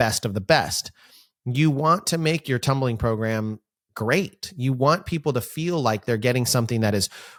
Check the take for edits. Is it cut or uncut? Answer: uncut